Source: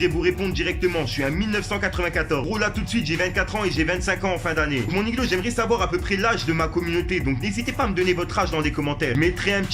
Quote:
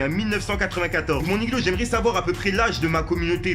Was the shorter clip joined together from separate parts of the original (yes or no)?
yes